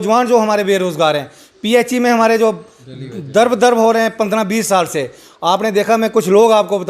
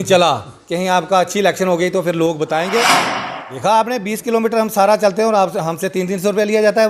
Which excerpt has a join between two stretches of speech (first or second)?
second